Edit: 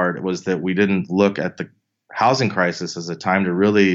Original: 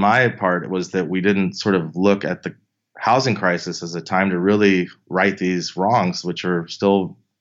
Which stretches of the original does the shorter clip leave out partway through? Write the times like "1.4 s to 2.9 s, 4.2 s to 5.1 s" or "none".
1.5 s to 1.9 s